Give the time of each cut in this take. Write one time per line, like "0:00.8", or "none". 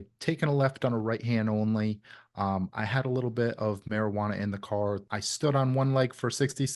0:05.1